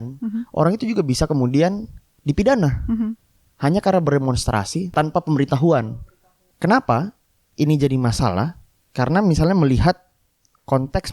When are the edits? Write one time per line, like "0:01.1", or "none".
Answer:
0:04.9
0:05.8